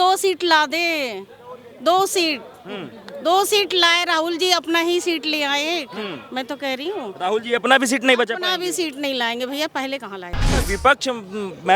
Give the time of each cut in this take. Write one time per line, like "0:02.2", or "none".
0:10.5